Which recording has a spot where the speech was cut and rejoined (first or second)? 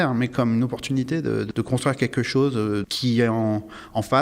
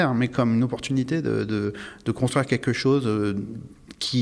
first